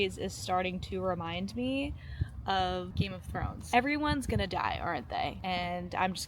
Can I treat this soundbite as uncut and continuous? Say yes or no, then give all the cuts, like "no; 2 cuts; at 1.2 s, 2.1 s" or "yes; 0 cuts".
no; 2 cuts; at 2.9 s, 5.4 s